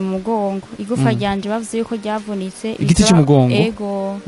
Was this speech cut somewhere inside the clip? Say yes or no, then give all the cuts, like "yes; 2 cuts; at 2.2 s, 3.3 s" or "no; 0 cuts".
no; 0 cuts